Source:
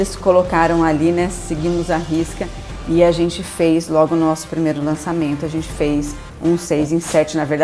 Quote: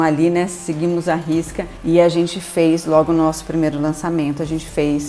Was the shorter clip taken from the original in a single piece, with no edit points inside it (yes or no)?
no